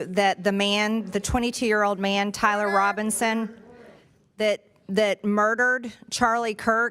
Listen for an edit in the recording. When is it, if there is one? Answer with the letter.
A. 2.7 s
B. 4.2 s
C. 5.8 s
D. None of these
D